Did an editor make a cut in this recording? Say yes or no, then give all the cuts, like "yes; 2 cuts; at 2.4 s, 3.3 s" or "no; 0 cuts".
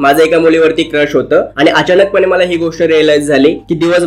no; 0 cuts